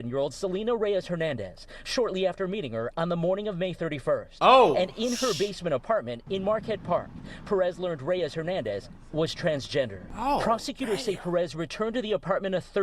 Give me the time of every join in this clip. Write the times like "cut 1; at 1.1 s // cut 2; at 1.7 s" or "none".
cut 1; at 10.0 s

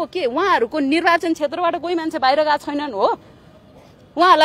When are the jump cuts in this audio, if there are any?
none

